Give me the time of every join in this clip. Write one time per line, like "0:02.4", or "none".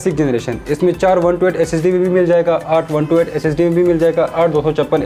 none